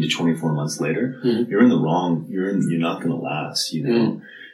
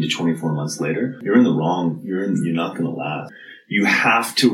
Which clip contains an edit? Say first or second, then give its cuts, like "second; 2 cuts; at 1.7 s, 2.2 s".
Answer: second; 2 cuts; at 1.2 s, 3.4 s